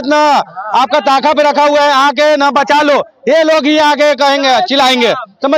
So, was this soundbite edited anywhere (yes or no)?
no